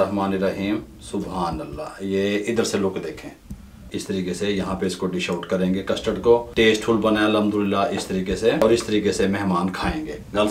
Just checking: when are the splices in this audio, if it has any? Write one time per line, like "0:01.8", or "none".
0:03.9
0:06.5
0:08.6